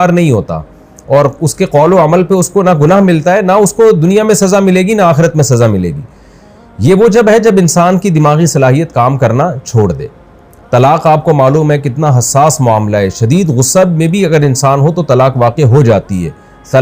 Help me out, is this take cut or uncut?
uncut